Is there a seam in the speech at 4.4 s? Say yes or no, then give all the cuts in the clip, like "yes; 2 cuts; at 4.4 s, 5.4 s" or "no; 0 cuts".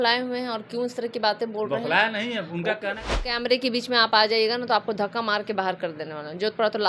no; 1 cut; at 3.0 s